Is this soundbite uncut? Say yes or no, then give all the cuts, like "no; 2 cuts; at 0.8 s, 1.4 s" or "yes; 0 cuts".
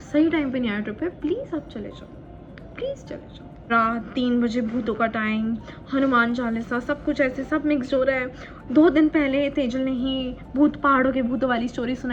no; 1 cut; at 3.7 s